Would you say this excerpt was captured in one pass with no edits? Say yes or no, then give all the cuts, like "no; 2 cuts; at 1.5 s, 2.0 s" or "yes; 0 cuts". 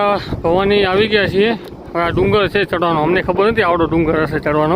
yes; 0 cuts